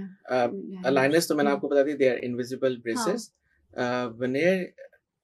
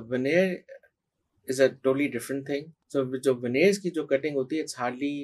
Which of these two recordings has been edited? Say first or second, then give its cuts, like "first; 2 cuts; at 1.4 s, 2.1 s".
second; 1 cut; at 2.7 s